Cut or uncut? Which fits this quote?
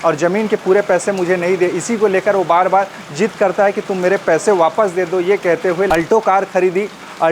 cut